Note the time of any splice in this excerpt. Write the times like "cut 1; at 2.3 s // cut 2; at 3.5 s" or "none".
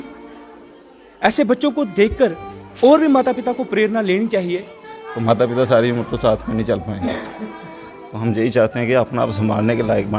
cut 1; at 4.8 s